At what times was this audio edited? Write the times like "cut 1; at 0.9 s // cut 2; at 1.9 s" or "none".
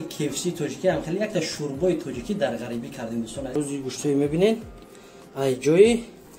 cut 1; at 3.5 s